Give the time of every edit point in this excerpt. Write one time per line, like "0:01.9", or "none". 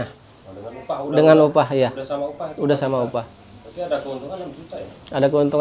none